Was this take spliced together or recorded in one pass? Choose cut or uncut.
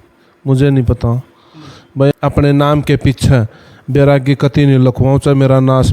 cut